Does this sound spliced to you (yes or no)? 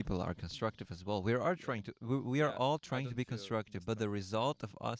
no